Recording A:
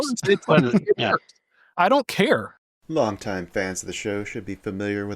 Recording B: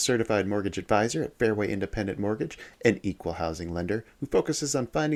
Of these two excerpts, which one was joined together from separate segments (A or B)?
A